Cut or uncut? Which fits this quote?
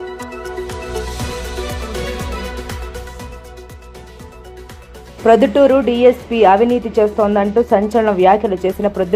cut